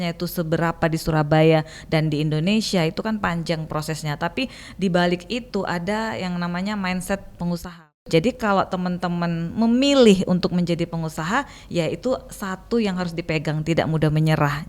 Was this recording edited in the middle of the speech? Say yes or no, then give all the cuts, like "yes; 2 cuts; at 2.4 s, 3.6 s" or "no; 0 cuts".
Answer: yes; 1 cut; at 7.7 s